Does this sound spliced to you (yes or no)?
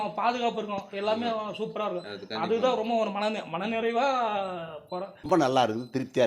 yes